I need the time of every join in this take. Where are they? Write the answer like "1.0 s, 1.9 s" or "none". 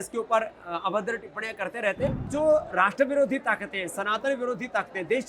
2.2 s

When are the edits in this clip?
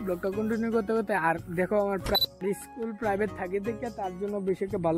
2.1 s

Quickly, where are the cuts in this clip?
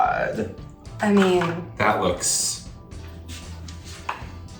none

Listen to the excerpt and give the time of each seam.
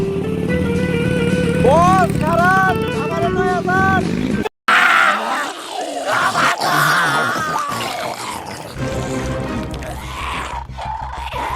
4.4 s

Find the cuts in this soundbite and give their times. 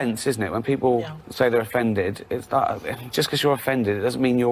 none

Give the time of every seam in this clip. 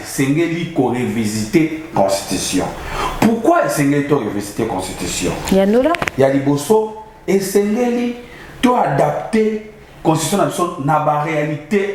none

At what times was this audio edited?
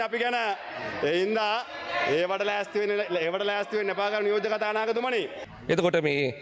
none

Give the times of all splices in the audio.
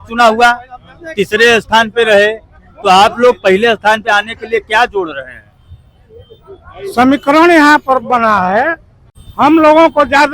9.2 s

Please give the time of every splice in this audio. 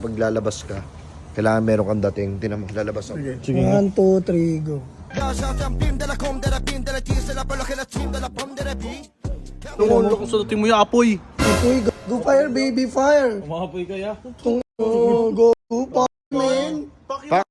none

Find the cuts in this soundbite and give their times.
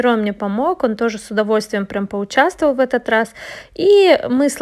none

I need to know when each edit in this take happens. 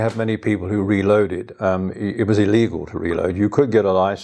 none

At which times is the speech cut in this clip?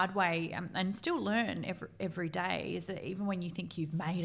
none

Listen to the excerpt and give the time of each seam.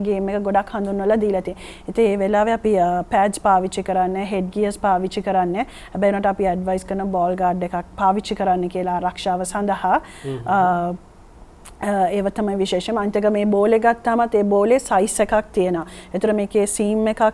none

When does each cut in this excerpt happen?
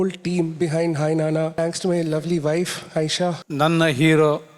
1.5 s, 3.4 s

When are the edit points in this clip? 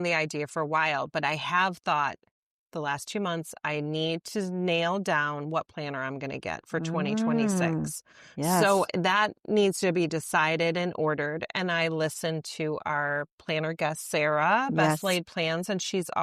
none

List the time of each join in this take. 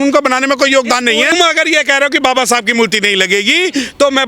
1.3 s

